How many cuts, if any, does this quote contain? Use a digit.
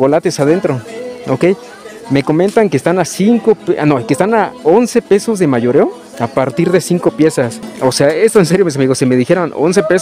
1